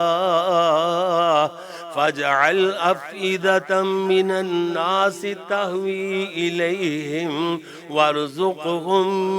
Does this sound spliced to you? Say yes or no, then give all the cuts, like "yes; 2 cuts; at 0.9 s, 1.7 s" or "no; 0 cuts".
no; 0 cuts